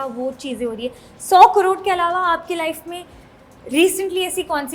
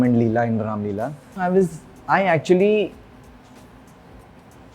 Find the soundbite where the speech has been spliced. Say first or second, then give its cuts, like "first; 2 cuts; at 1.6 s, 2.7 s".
second; 1 cut; at 1.3 s